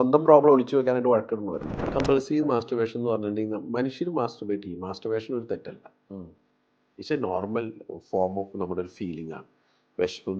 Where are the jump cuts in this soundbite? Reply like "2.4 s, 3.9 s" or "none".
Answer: 1.8 s

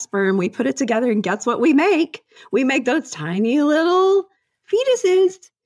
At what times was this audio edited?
none

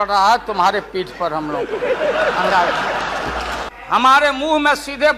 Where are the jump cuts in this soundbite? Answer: 3.6 s

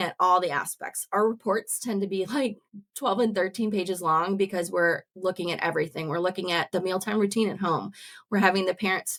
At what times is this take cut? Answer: none

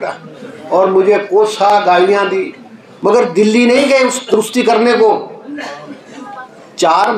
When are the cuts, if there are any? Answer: none

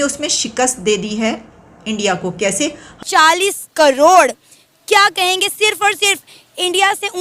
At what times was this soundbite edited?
2.9 s

